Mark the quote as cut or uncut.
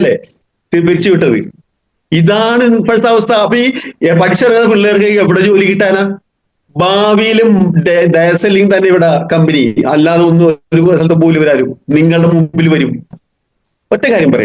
cut